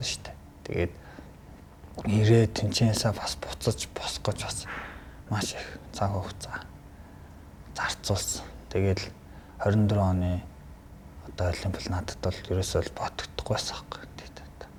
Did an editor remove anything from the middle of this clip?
no; 0 cuts

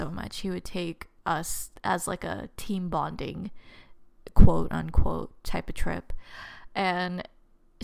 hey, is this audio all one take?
no; 1 cut; at 1.5 s

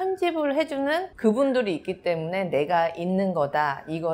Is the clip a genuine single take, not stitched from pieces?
no; 1 cut; at 1.1 s

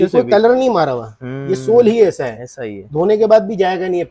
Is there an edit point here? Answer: no; 0 cuts

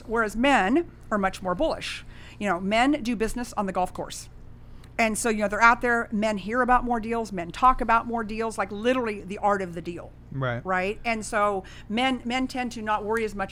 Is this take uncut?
yes; 0 cuts

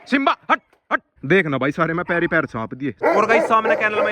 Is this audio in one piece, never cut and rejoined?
no; 2 cuts; at 1.2 s, 3.0 s

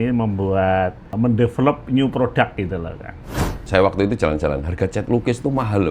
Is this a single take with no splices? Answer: no; 2 cuts; at 1.0 s, 3.7 s

